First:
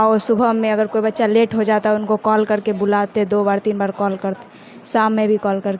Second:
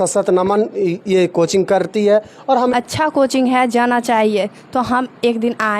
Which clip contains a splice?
second; 1 cut; at 2.4 s

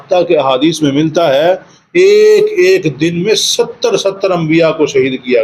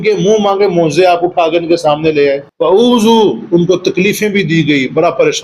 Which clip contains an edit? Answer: second; 1 cut; at 2.5 s

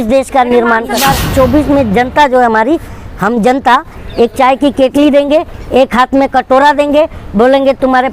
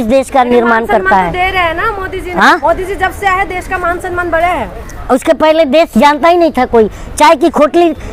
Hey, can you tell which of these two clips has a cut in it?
first; 1 cut; at 1.0 s

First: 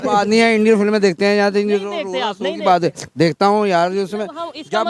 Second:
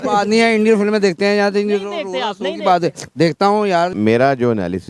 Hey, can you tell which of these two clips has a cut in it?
second; 1 cut; at 3.9 s

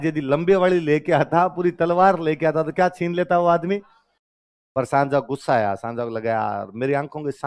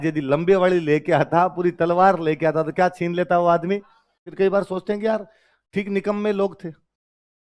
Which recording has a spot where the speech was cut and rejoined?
second; 1 cut; at 4.2 s

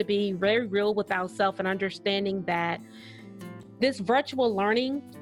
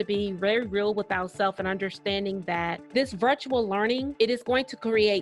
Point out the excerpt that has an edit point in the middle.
second; 2 cuts; at 2.8 s, 4.1 s

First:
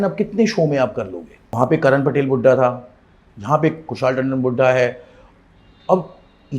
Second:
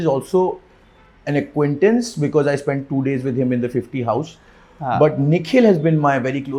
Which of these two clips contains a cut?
first; 1 cut; at 1.5 s

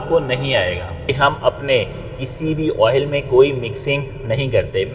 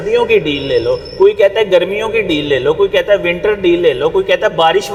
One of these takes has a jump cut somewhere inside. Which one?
first; 1 cut; at 1.0 s

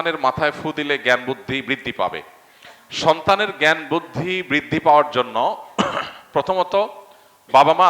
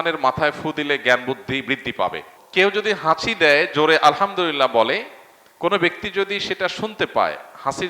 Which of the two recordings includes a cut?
second; 1 cut; at 2.4 s

